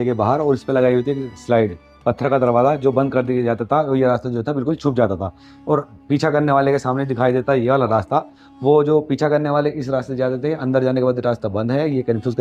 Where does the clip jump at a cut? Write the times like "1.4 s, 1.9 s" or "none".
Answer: none